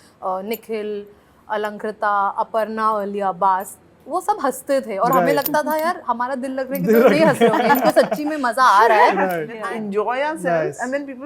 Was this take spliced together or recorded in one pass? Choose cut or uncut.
cut